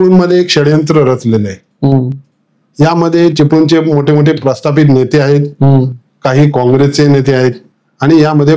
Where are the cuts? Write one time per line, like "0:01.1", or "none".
none

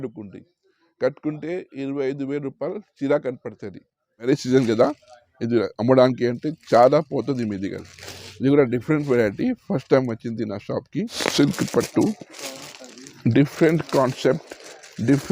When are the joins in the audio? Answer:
0:04.3
0:11.1

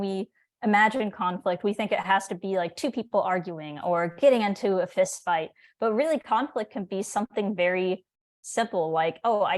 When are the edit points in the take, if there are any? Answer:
none

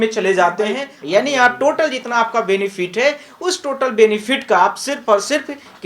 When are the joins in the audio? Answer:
0:00.9

